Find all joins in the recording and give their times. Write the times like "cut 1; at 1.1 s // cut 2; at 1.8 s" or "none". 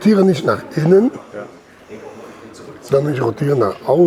none